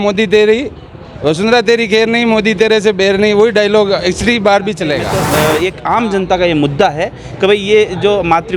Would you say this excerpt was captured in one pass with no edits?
no; 1 cut; at 5.4 s

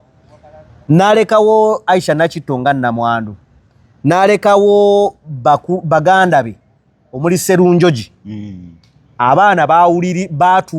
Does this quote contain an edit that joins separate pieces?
no; 0 cuts

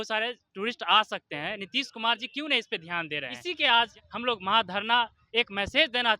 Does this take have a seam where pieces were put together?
yes; 1 cut; at 3.3 s

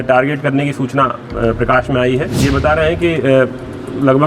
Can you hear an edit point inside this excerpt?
yes; 1 cut; at 2.3 s

